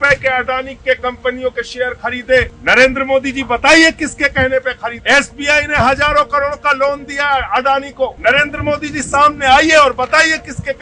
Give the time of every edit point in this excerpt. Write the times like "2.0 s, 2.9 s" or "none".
2.5 s, 5.0 s, 8.2 s